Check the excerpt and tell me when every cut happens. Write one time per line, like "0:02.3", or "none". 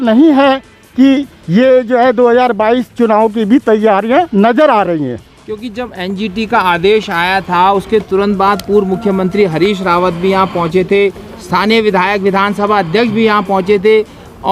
none